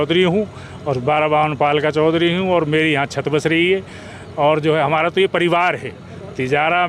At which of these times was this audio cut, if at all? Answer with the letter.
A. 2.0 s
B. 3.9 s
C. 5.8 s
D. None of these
D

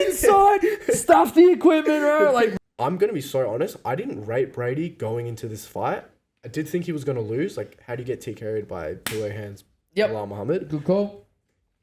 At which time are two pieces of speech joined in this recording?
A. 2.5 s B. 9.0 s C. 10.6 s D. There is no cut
A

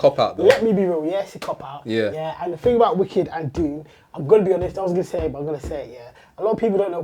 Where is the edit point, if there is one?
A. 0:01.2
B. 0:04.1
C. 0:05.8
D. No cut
D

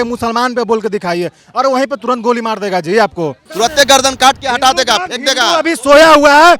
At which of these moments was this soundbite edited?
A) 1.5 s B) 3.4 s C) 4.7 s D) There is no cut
B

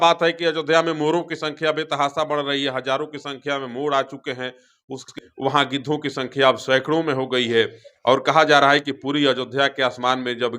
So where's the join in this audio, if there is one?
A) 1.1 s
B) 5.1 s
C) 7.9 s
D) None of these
B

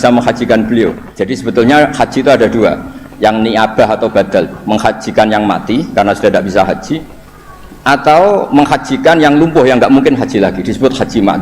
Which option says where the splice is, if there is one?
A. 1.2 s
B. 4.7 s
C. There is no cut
A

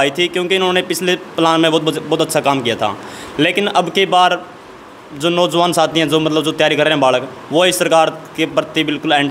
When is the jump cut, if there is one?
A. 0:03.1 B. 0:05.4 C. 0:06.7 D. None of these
D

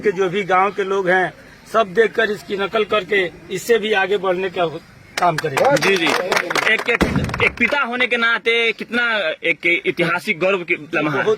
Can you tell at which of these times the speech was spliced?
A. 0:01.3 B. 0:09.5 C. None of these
C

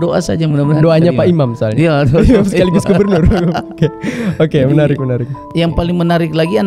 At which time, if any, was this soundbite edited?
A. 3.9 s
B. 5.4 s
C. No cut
B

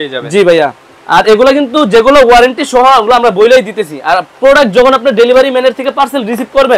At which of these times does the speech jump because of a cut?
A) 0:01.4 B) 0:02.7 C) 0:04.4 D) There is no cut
D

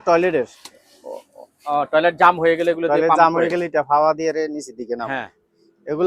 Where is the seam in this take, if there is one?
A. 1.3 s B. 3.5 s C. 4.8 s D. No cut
D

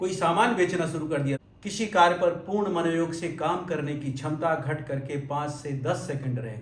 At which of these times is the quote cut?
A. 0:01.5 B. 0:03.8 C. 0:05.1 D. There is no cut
A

